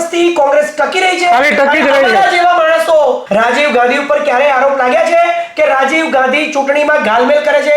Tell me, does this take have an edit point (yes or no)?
yes